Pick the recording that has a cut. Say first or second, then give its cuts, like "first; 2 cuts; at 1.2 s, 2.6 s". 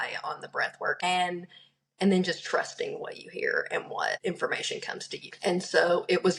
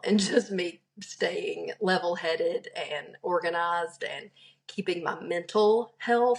first; 3 cuts; at 1.0 s, 4.2 s, 5.3 s